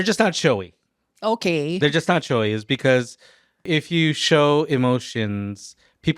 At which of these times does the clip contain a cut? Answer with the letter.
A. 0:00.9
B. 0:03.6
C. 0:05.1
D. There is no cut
B